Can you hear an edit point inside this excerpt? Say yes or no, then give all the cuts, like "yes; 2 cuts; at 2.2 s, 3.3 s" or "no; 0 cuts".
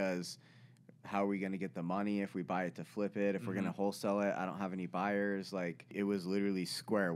yes; 1 cut; at 5.9 s